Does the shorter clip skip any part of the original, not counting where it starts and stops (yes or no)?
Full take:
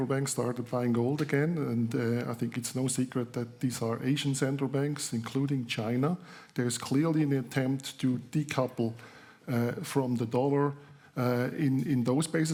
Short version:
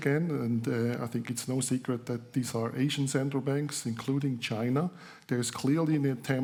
no